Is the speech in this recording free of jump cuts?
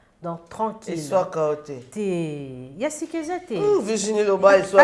yes; 0 cuts

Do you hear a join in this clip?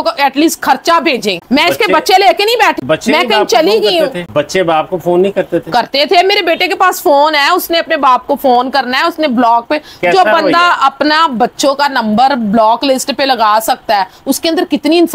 no; 0 cuts

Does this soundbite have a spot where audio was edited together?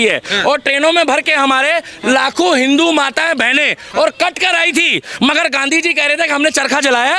no; 0 cuts

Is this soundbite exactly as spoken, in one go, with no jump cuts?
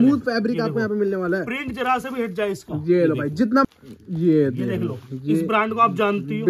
no; 1 cut; at 3.6 s

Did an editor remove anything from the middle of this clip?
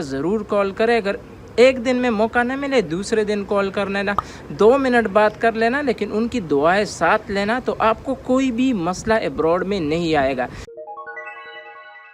yes; 1 cut; at 10.7 s

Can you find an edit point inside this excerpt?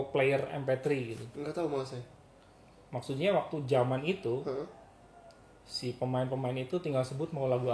no; 0 cuts

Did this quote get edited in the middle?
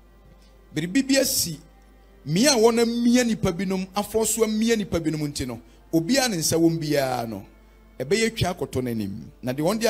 no; 0 cuts

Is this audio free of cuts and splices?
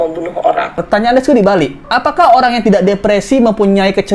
no; 2 cuts; at 0.8 s, 1.8 s

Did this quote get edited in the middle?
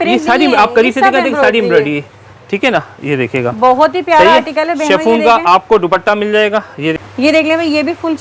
yes; 1 cut; at 7.0 s

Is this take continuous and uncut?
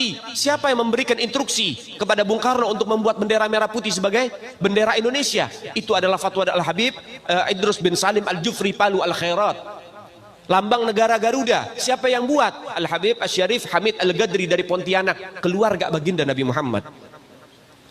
yes; 0 cuts

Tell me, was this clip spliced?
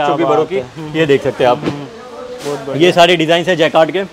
no; 0 cuts

